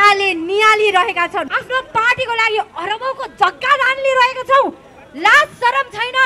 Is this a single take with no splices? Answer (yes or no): no